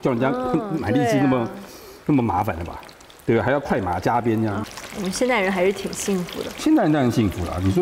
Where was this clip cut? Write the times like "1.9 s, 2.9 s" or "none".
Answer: none